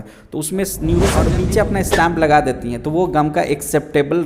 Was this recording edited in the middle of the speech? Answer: yes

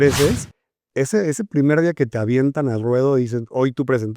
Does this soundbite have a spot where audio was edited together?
no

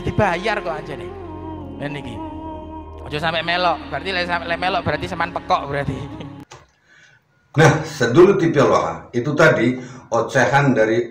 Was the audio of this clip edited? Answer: no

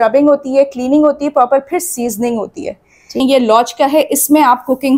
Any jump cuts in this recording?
yes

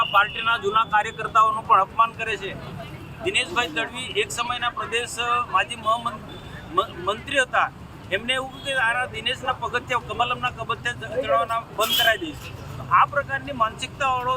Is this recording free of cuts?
yes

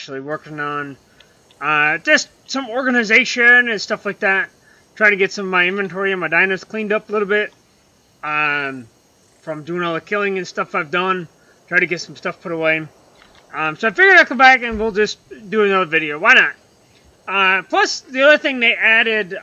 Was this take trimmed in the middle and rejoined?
no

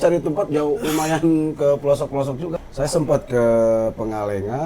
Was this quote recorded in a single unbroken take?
no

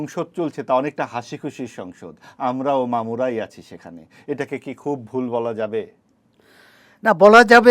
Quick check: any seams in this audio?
no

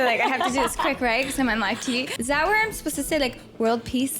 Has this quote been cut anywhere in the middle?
yes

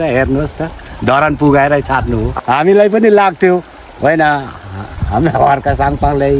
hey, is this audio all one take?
no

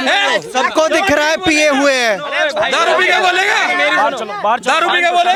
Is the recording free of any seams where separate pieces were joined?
yes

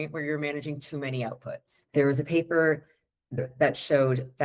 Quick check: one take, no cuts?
no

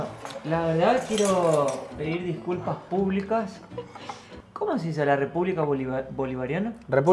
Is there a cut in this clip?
no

